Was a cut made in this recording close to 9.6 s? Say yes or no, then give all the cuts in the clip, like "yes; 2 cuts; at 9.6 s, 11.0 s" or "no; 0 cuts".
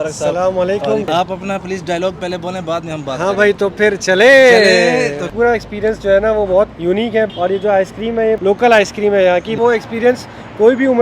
yes; 5 cuts; at 1.1 s, 5.3 s, 7.1 s, 8.4 s, 9.6 s